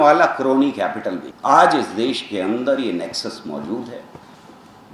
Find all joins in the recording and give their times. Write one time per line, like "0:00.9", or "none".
0:01.2